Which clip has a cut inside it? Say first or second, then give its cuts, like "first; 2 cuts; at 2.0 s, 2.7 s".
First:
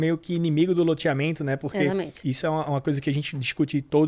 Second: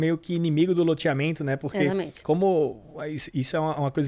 first; 1 cut; at 2.1 s